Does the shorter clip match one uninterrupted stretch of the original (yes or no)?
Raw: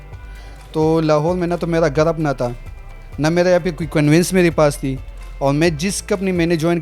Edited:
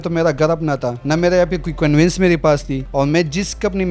no